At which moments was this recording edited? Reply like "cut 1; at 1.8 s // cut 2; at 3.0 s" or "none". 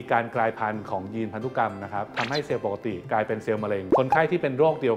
cut 1; at 2.1 s // cut 2; at 4.0 s